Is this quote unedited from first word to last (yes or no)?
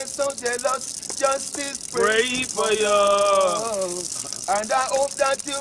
yes